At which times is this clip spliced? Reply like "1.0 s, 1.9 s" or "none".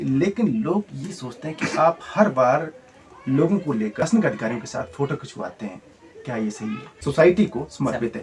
4.0 s, 6.9 s